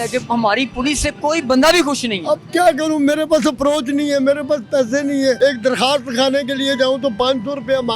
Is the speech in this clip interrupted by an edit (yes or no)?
yes